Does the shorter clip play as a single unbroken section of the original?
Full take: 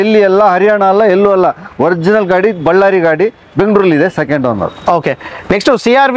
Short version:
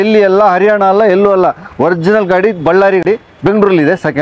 no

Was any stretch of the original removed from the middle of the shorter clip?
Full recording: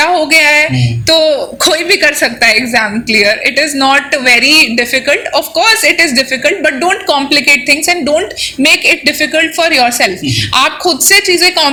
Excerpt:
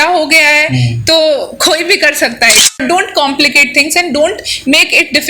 yes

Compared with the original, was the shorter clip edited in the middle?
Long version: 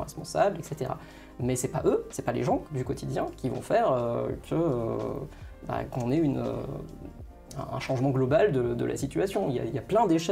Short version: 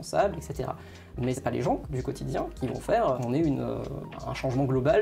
yes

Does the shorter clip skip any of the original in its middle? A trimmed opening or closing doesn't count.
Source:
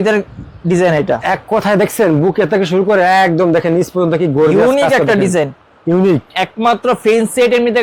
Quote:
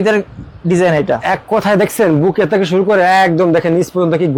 no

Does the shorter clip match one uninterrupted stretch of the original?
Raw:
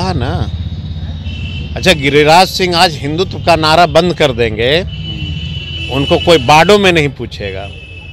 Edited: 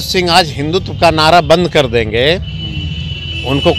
yes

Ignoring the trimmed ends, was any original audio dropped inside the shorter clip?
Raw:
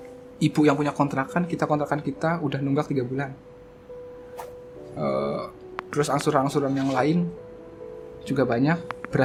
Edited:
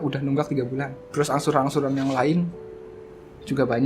yes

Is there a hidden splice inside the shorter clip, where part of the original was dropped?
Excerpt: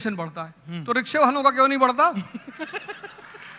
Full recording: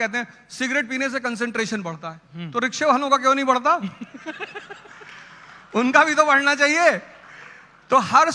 no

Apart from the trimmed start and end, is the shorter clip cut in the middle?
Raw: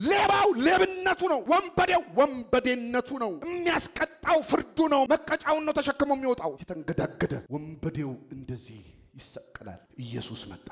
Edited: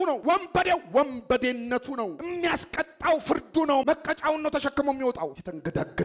no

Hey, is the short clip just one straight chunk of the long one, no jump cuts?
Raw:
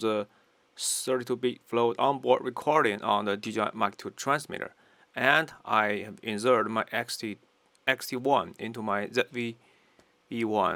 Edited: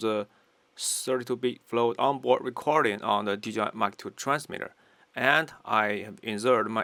yes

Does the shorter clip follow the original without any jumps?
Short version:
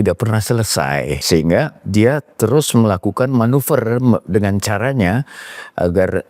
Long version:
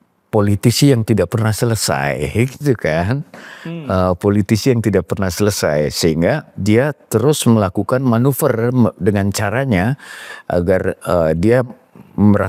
no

